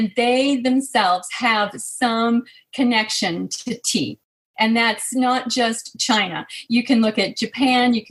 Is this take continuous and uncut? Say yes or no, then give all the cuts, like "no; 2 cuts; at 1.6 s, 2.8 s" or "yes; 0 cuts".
yes; 0 cuts